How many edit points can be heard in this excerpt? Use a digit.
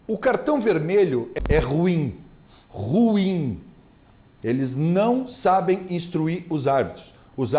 1